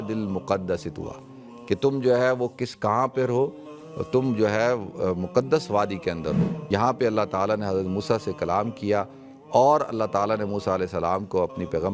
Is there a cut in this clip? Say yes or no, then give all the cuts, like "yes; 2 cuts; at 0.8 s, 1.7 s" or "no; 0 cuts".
yes; 1 cut; at 6.5 s